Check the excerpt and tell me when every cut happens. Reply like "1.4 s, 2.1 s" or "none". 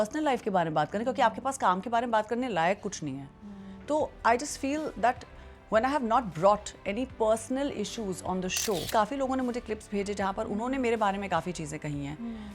8.9 s